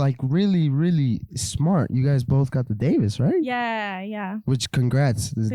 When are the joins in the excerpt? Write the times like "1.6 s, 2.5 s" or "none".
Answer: none